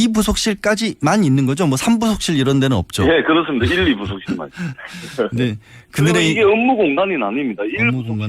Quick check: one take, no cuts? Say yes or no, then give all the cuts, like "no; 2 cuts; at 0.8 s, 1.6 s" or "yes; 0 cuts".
no; 1 cut; at 5.5 s